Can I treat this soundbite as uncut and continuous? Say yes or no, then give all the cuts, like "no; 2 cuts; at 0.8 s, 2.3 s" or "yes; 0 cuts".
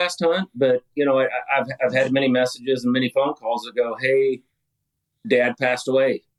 yes; 0 cuts